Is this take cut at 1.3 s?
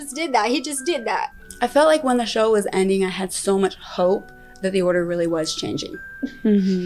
yes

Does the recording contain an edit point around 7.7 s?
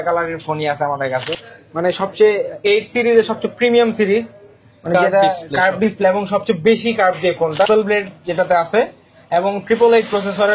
yes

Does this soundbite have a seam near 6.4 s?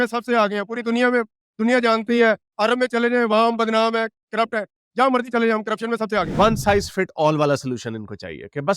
yes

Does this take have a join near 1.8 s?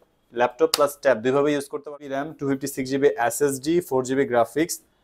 yes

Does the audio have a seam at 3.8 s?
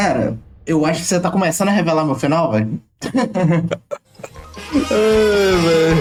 no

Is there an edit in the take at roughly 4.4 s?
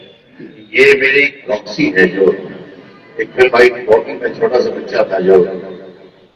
no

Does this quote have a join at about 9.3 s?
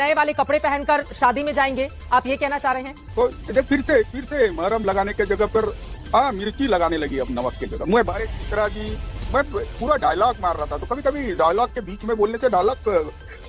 no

